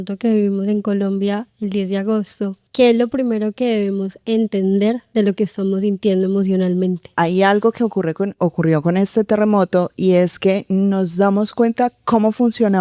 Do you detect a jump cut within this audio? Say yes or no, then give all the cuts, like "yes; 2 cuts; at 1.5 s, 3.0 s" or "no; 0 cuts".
yes; 3 cuts; at 2.6 s, 5.0 s, 7.1 s